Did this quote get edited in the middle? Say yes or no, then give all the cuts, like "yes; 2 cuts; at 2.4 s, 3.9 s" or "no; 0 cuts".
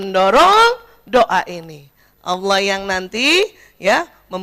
no; 0 cuts